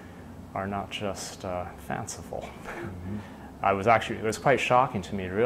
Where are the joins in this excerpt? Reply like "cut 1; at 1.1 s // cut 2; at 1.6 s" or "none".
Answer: none